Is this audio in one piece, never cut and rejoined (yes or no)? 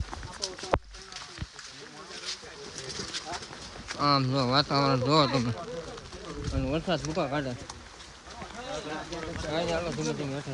yes